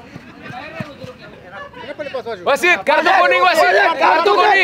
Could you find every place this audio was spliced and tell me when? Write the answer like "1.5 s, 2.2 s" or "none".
1.4 s